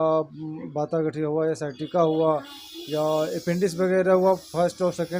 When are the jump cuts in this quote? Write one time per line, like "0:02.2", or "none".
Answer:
none

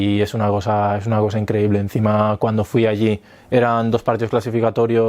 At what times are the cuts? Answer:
none

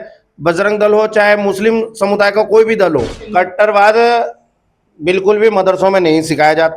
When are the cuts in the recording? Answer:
0:03.2

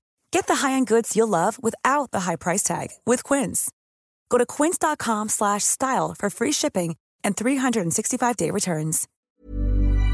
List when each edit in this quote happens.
0:09.1

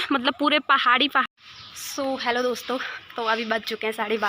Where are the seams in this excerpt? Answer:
0:01.3

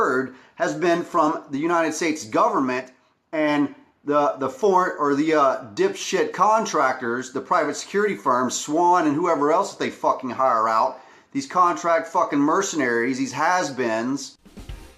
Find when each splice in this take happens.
0:02.9

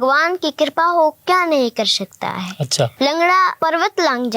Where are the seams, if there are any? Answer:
0:02.9
0:03.6

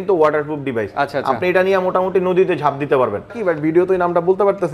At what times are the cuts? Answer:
0:03.3

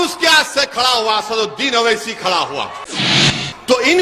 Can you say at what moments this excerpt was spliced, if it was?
0:03.0

